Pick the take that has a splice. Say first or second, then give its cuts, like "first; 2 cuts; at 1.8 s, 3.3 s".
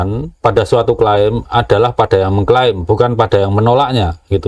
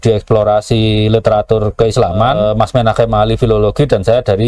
second; 1 cut; at 2.4 s